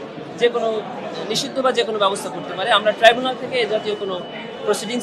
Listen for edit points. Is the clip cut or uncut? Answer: uncut